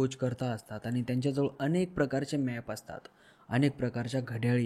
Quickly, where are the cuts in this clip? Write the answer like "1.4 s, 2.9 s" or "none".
none